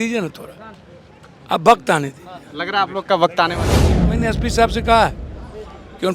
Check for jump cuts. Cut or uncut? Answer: cut